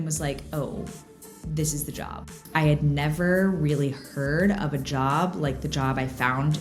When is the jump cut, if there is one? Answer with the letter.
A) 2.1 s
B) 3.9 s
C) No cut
A